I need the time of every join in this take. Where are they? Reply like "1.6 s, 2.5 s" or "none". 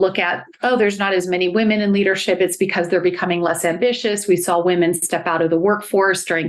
none